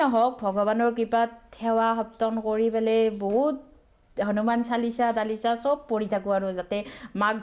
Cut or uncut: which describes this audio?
uncut